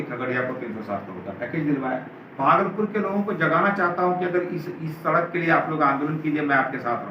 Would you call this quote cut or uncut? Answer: cut